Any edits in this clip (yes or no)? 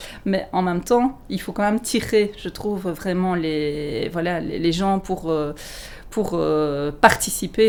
no